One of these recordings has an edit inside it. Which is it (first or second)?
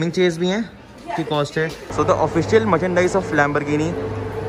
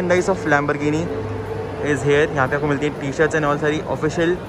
first